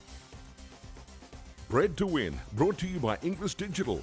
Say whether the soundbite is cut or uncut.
cut